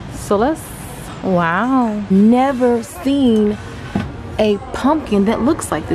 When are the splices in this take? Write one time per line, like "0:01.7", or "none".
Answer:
0:02.1